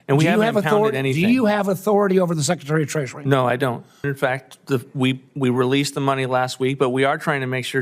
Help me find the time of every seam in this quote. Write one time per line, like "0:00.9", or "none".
0:04.0